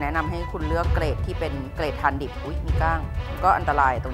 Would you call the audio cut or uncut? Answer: uncut